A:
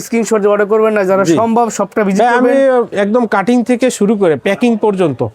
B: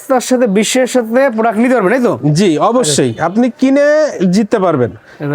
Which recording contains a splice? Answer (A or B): A